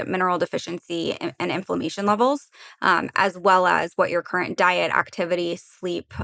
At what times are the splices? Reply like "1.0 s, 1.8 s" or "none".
none